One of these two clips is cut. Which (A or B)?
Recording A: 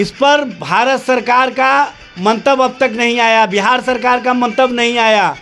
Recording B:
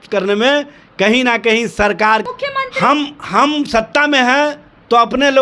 B